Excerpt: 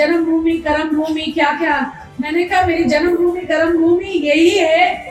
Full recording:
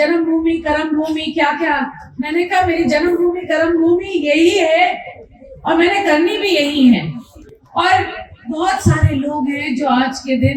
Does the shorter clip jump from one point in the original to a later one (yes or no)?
no